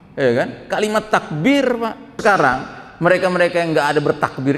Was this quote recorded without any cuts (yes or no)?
no